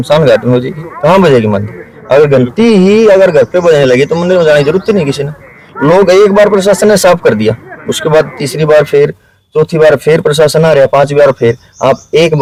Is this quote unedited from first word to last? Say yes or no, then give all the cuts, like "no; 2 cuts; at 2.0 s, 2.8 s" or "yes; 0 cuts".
yes; 0 cuts